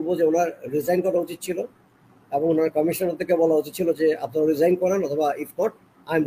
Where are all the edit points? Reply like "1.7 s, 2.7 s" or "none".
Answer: none

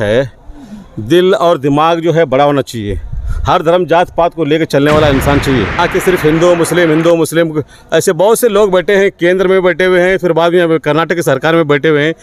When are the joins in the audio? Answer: 5.8 s

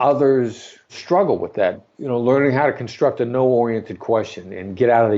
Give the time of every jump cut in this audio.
0.9 s, 1.8 s

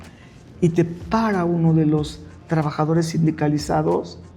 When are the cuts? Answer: none

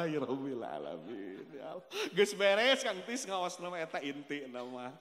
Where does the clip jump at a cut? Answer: none

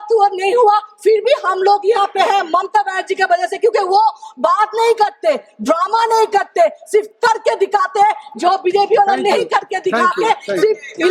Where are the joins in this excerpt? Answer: none

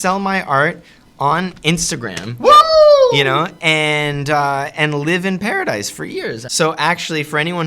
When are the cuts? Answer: 6.4 s

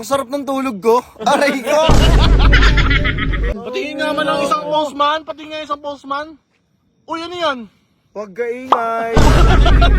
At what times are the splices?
3.6 s

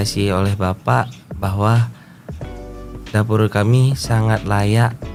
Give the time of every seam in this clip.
none

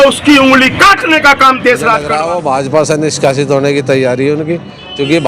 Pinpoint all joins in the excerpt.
2.0 s

